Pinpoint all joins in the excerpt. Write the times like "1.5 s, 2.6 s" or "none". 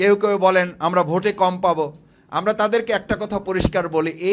none